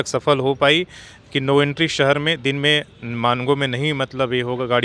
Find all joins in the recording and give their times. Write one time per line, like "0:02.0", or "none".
none